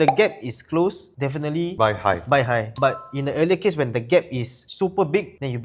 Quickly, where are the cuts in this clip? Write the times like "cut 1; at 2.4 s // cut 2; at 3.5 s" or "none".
none